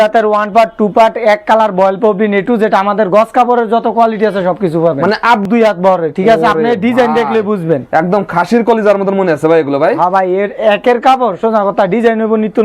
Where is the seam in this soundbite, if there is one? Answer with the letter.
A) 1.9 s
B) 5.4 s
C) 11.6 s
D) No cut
B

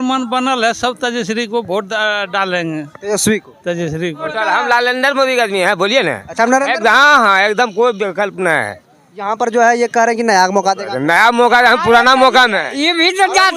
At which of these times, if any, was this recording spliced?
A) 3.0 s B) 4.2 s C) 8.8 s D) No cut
B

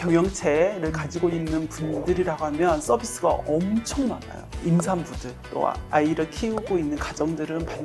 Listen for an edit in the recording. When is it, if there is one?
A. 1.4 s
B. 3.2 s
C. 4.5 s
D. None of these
C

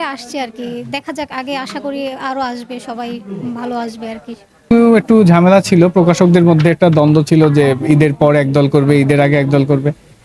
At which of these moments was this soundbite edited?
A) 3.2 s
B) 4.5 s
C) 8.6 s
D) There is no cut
B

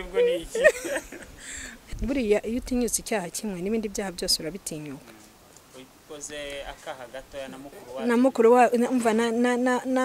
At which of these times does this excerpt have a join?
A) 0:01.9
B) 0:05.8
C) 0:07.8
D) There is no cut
A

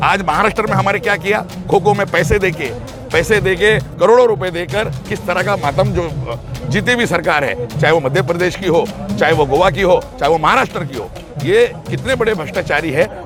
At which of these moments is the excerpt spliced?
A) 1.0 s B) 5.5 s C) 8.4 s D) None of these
D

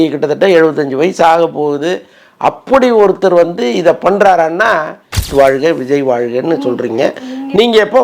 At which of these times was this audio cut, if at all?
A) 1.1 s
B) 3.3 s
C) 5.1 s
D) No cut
C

